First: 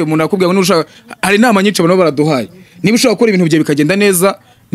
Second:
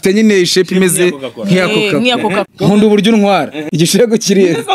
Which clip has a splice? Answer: second; 2 cuts; at 2.5 s, 3.6 s

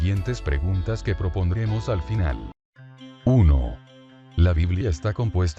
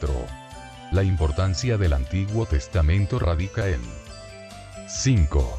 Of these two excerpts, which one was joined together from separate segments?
first; 1 cut; at 2.3 s

